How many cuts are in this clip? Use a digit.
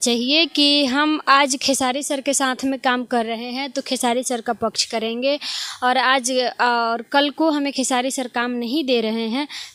0